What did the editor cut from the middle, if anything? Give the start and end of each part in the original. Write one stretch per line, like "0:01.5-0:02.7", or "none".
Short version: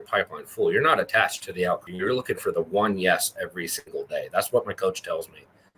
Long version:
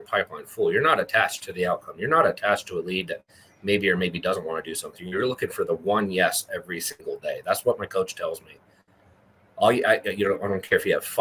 0:01.9-0:05.0